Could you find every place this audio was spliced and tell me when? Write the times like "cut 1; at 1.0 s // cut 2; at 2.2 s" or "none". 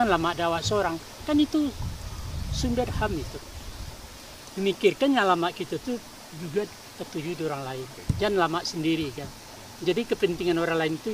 cut 1; at 7.8 s